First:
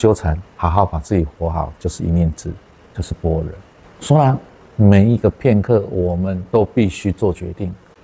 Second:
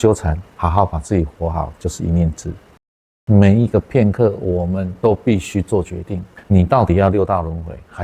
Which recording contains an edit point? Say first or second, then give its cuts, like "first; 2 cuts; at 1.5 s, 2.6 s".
second; 2 cuts; at 3.0 s, 6.3 s